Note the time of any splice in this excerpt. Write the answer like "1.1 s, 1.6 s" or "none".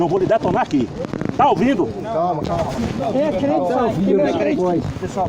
2.8 s